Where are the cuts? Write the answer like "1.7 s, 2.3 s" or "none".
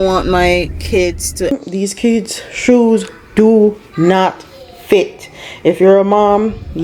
1.5 s